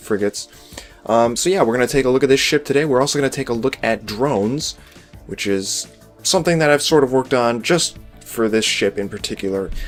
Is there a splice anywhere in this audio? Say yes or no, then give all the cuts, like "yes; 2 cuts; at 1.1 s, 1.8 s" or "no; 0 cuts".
no; 0 cuts